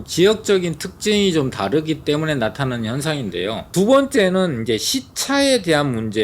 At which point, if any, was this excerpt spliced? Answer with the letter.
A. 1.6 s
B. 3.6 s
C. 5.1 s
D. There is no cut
B